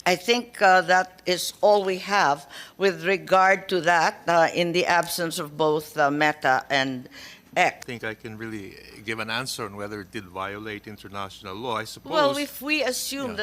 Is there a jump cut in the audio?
yes; 1 cut; at 7.9 s

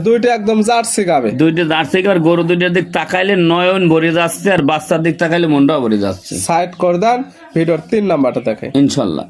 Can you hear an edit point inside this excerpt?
no; 0 cuts

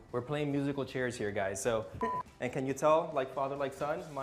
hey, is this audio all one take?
no; 1 cut; at 2.3 s

